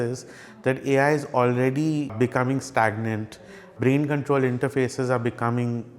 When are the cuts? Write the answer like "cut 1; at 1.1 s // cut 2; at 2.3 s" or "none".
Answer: cut 1; at 2.1 s // cut 2; at 3.7 s